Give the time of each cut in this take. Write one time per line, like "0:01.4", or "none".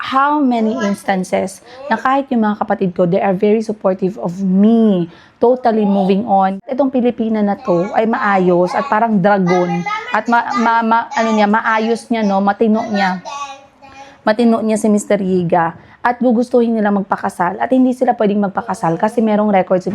0:06.6